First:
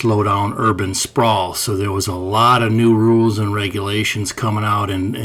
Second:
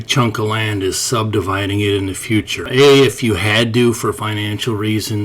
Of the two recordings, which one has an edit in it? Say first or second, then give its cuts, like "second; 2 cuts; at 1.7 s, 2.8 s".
second; 1 cut; at 2.7 s